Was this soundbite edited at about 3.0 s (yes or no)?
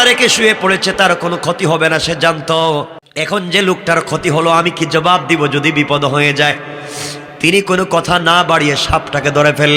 yes